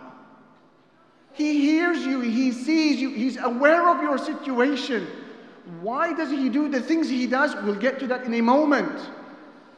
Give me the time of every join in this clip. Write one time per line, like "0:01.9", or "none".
0:01.2